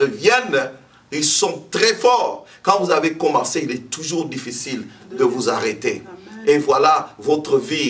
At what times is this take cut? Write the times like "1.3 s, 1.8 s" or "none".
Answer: none